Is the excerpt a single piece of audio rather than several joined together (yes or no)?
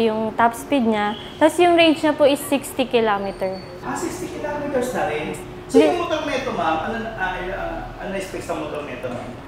no